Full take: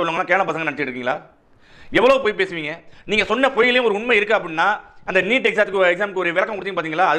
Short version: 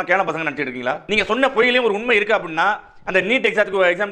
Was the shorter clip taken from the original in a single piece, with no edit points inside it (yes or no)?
no